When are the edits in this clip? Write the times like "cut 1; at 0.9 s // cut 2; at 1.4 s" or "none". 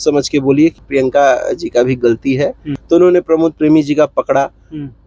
cut 1; at 0.8 s // cut 2; at 2.7 s